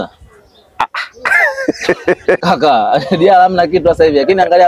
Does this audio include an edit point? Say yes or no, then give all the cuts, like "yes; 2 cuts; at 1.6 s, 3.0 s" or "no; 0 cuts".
yes; 1 cut; at 2.4 s